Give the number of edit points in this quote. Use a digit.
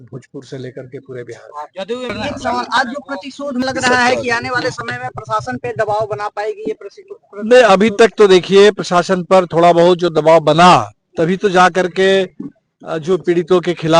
2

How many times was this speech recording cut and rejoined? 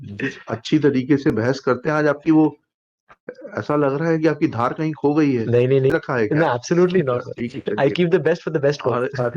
1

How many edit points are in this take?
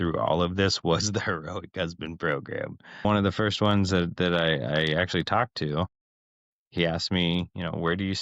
1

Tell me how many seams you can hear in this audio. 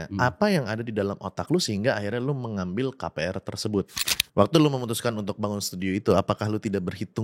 1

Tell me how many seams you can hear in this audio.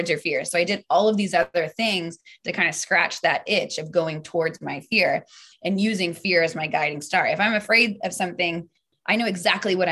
1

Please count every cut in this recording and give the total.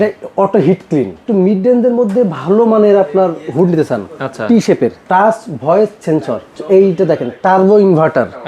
3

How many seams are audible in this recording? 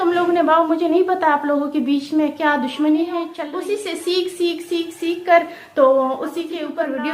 1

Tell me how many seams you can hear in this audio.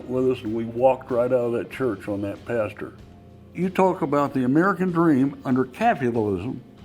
1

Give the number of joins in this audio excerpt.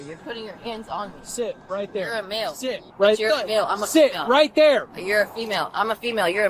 0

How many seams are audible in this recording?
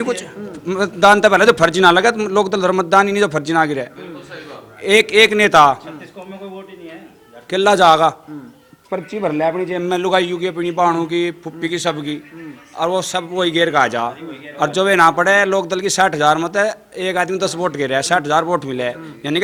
0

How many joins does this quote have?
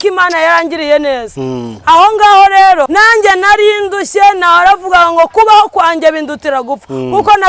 1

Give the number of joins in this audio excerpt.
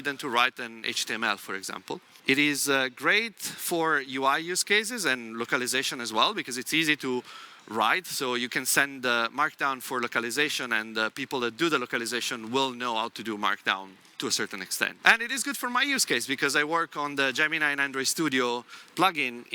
2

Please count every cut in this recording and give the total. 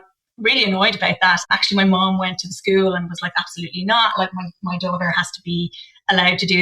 1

